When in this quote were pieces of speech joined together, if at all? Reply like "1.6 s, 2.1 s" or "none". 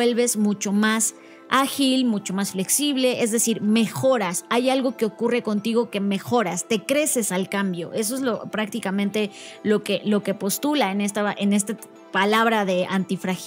none